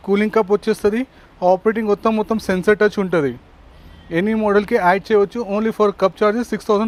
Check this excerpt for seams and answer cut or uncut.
uncut